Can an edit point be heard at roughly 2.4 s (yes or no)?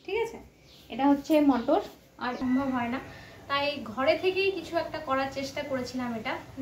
yes